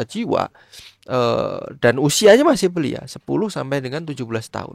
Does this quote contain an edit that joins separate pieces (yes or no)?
no